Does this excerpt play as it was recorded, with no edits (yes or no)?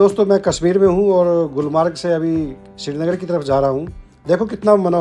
yes